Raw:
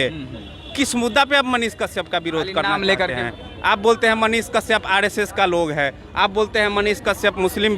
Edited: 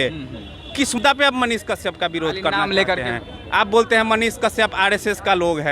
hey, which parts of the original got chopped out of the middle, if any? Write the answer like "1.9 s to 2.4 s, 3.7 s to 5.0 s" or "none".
1.0 s to 1.1 s